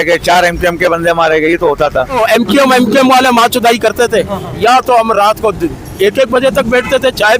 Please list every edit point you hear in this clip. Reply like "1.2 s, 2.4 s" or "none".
2.2 s